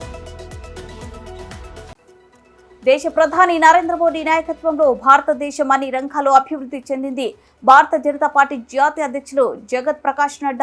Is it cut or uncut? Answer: cut